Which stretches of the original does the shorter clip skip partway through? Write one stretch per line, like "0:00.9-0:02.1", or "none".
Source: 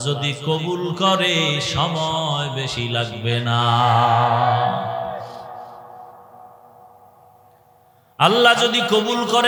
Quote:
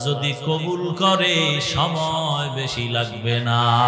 none